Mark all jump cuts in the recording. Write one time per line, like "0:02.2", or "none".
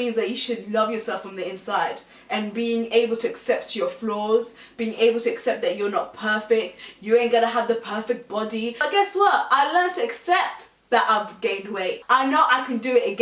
0:08.8
0:12.0